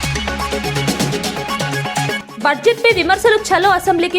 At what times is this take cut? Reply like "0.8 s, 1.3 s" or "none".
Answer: 2.2 s